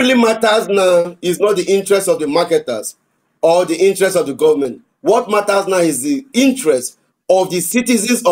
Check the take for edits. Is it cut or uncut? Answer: uncut